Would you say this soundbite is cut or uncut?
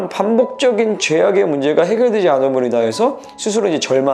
uncut